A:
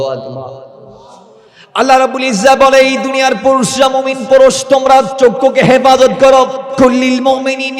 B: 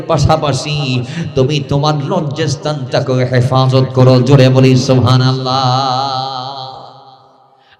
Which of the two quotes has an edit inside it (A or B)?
A